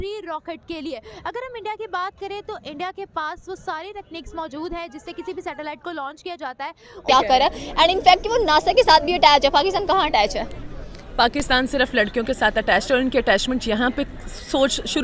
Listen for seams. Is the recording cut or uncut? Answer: cut